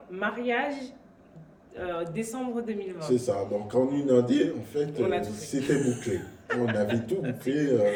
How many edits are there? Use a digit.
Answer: 0